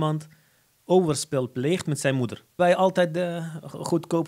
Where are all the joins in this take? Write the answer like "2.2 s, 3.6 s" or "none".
2.6 s

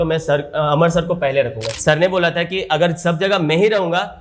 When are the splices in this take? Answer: 1.7 s

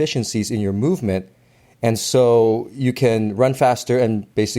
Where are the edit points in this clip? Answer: none

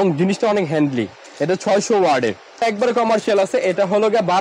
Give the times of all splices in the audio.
2.6 s

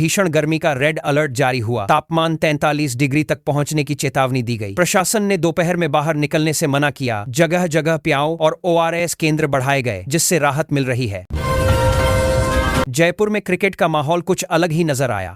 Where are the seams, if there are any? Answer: 11.2 s, 12.8 s

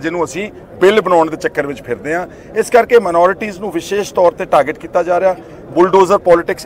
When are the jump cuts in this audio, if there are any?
none

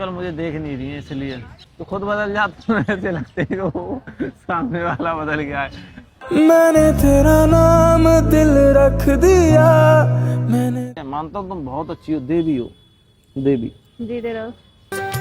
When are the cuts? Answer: 1.6 s, 11.0 s

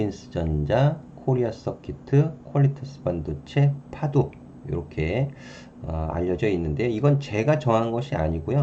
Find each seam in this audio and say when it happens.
none

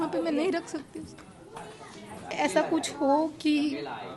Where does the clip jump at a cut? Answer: 2.3 s

